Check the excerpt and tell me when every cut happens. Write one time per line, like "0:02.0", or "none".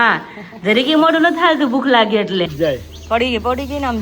0:02.5